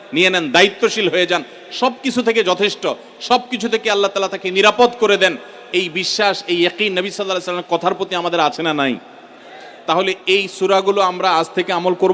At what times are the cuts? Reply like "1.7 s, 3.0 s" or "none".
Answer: none